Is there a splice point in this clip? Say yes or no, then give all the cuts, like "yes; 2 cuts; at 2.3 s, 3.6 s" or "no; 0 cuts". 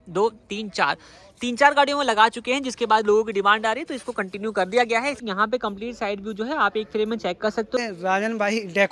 yes; 2 cuts; at 5.2 s, 7.8 s